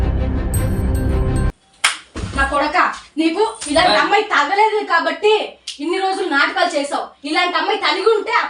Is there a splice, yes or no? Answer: yes